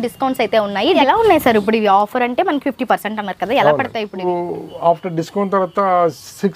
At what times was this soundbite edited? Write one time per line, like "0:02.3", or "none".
0:01.1
0:04.2

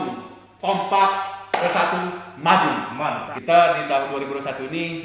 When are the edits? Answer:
0:03.3

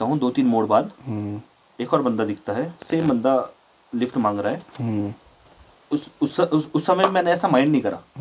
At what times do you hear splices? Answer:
none

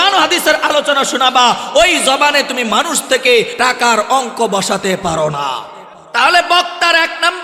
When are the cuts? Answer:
0:03.5

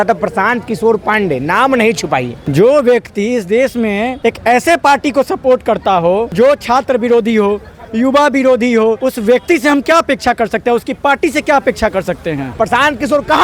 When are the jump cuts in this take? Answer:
0:02.4
0:04.1
0:06.3
0:09.0
0:12.5

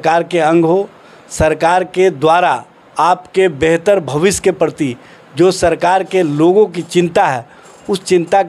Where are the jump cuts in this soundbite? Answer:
none

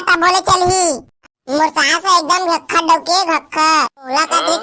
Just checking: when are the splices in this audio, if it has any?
0:01.2

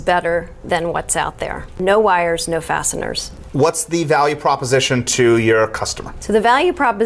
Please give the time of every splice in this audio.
none

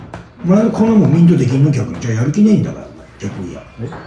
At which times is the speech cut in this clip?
none

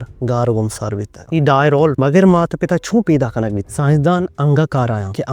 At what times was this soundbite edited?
0:01.1
0:03.6

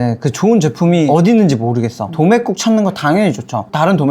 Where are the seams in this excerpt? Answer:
0:01.1
0:02.0

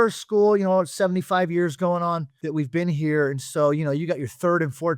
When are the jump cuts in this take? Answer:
0:02.3

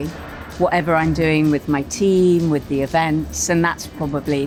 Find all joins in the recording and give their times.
none

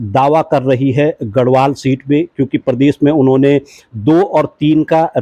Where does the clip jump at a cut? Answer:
none

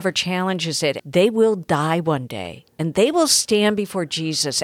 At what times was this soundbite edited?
0:01.0

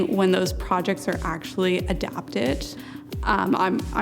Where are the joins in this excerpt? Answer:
0:02.7

